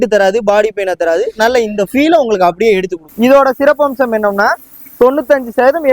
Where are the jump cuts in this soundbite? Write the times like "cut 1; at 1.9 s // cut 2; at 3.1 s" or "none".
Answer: cut 1; at 3.0 s